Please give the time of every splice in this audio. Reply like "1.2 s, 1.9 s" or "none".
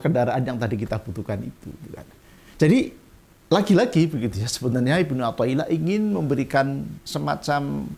none

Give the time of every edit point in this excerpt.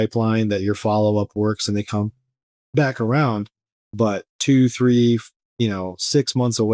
none

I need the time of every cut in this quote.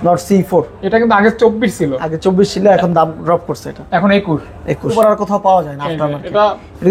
4.9 s

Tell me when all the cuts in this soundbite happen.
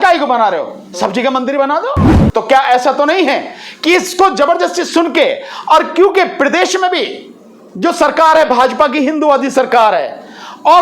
2.1 s

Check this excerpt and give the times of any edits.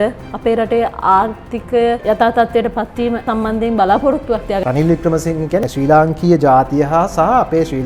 2.0 s, 3.2 s, 4.6 s, 5.7 s

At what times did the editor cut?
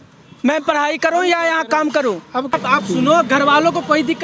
2.5 s

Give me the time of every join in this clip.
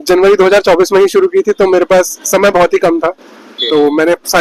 none

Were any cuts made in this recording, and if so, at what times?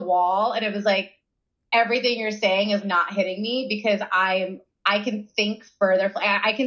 4.7 s

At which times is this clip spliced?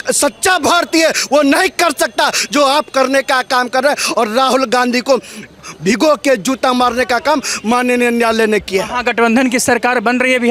none

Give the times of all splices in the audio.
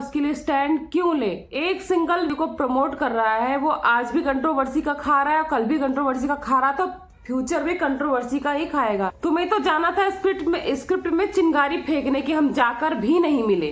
2.3 s, 9.1 s

